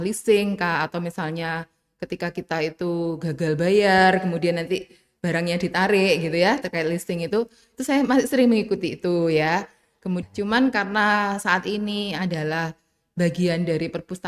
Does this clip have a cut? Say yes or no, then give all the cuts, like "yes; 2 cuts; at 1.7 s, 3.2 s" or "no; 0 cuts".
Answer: yes; 1 cut; at 10.2 s